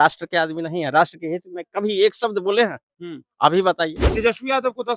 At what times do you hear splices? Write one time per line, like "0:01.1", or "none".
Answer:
0:04.0

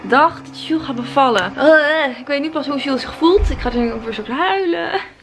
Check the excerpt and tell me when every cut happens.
none

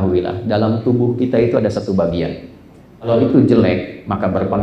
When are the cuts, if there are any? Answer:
0:03.1

